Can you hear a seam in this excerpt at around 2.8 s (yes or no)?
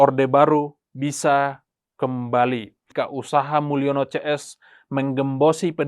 yes